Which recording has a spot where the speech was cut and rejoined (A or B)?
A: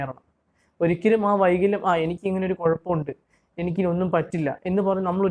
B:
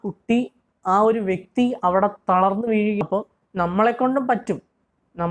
B